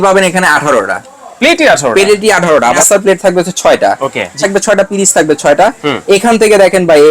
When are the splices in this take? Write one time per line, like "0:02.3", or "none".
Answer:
0:02.8
0:04.3